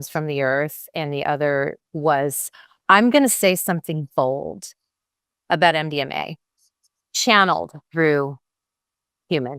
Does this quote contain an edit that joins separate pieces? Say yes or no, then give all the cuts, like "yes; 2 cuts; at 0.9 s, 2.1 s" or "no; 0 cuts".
yes; 2 cuts; at 1.9 s, 2.5 s